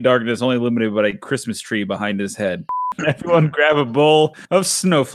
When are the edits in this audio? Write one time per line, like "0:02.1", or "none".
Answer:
0:02.7